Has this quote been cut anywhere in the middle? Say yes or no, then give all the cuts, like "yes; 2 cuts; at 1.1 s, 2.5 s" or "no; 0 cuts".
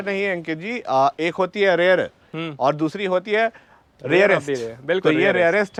no; 0 cuts